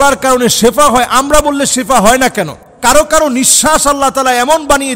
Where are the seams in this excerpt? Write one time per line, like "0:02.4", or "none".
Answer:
0:02.6